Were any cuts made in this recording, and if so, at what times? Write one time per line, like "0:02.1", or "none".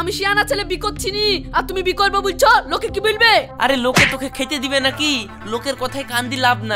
none